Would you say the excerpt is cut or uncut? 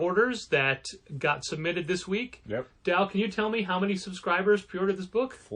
uncut